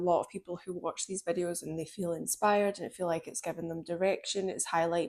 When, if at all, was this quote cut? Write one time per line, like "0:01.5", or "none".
none